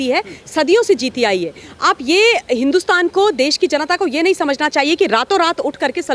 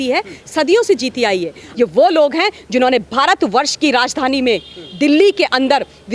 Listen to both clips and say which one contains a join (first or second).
second